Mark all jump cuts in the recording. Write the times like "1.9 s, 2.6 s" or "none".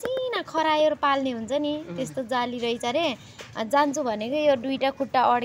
none